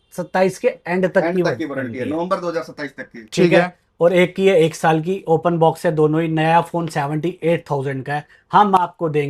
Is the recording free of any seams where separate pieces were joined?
yes; 0 cuts

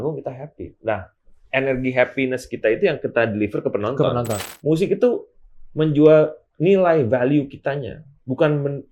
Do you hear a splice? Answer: yes; 1 cut; at 4.5 s

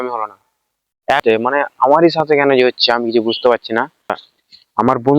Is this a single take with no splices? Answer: no; 2 cuts; at 1.2 s, 4.2 s

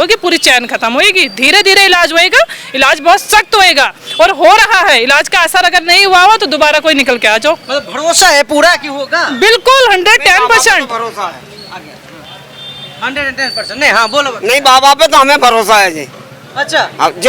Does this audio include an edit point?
no; 0 cuts

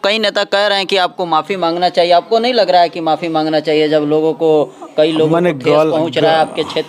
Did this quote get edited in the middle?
no; 0 cuts

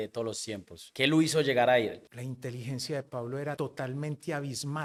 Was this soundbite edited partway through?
no; 0 cuts

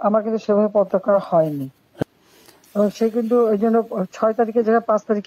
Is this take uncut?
no; 1 cut; at 2.0 s

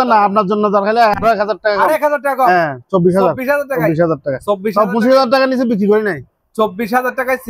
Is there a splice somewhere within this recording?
no; 0 cuts

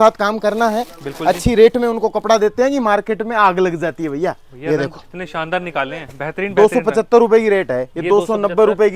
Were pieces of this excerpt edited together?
no; 0 cuts

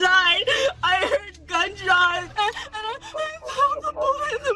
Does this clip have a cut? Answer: yes; 1 cut; at 2.2 s

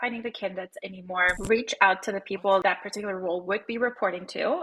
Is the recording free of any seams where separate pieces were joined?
no; 2 cuts; at 1.4 s, 2.6 s

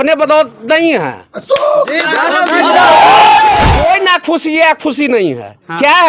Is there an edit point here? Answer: yes; 1 cut; at 3.7 s

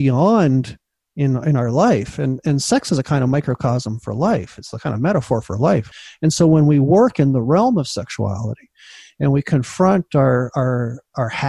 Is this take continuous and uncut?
no; 1 cut; at 6.0 s

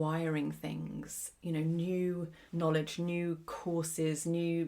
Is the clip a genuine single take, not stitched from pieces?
no; 2 cuts; at 2.4 s, 3.5 s

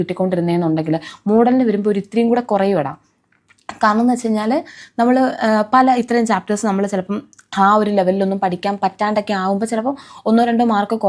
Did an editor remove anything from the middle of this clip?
no; 0 cuts

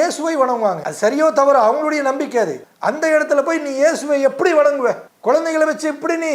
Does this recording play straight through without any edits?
no; 3 cuts; at 0.9 s, 2.7 s, 5.1 s

